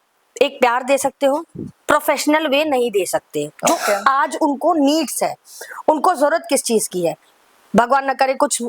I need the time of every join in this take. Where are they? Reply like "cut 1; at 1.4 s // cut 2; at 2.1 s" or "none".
none